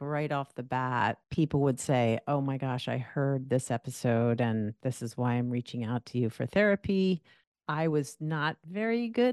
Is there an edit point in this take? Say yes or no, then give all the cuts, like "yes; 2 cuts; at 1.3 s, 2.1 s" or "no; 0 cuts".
yes; 1 cut; at 1.2 s